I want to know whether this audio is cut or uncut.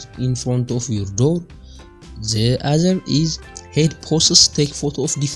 uncut